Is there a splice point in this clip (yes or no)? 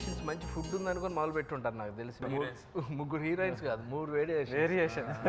yes